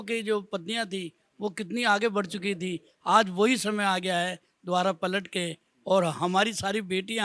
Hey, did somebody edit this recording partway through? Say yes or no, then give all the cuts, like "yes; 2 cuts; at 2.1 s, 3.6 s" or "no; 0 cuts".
no; 0 cuts